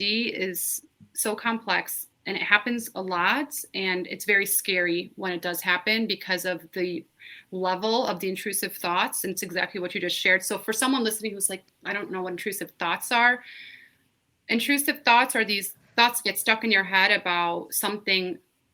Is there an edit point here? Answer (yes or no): no